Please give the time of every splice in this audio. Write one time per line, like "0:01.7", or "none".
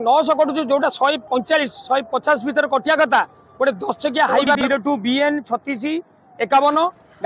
0:04.6